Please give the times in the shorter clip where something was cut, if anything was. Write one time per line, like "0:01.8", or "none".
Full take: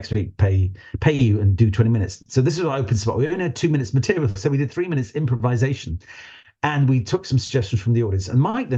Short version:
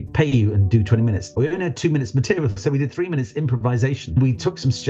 0:01.4
0:04.2